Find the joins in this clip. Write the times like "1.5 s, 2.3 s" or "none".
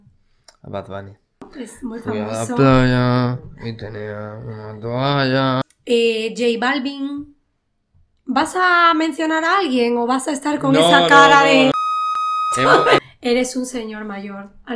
1.5 s, 5.6 s, 13.1 s